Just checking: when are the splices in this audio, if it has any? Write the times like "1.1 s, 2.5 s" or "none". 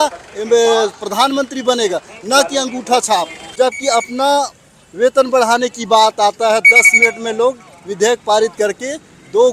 3.4 s